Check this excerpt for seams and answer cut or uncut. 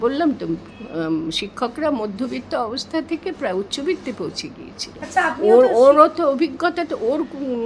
uncut